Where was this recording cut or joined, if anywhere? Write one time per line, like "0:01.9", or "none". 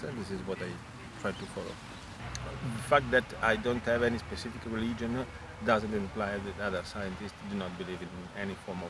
0:02.2